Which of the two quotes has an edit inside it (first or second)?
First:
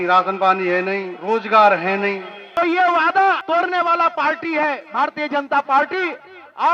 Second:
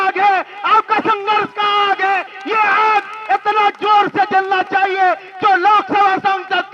first